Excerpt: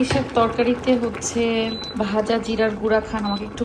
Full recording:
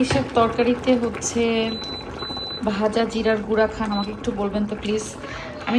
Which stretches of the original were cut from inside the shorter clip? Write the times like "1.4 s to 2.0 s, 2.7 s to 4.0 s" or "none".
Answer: 1.8 s to 2.5 s